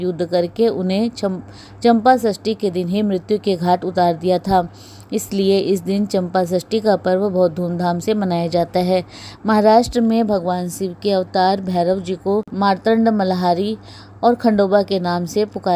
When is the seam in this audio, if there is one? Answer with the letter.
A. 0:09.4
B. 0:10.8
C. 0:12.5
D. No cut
C